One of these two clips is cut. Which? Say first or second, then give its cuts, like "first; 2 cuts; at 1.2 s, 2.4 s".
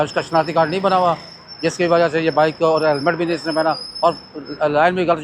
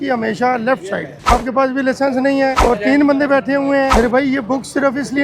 second; 3 cuts; at 1.3 s, 2.6 s, 3.9 s